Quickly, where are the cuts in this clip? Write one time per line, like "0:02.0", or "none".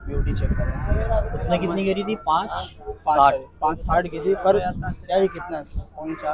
none

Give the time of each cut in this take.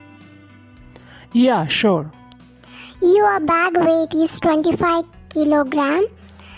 0:00.9

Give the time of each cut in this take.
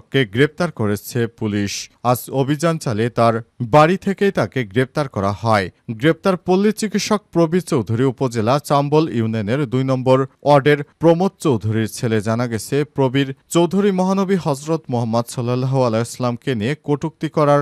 none

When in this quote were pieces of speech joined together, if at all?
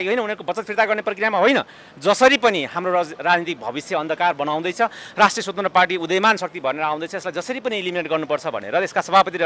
none

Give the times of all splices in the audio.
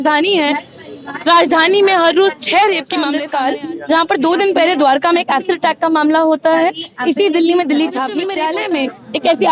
0:03.2
0:08.3

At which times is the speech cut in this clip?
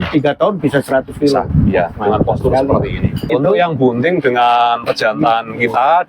0:03.3

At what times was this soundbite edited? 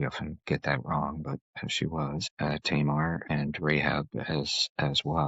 0:02.3
0:03.2

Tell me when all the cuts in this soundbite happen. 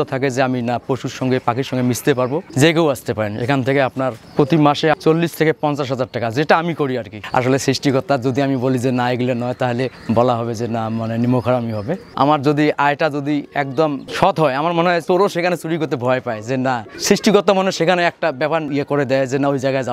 0:07.2
0:12.1
0:14.0
0:15.0
0:16.9
0:18.7

